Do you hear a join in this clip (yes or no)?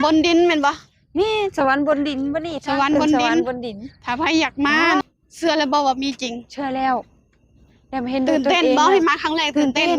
yes